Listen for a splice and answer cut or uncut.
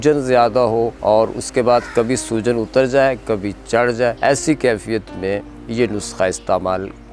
cut